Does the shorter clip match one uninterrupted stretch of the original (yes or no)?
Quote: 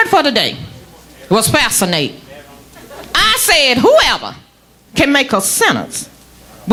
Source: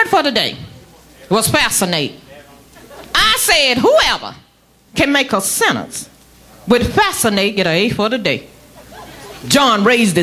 yes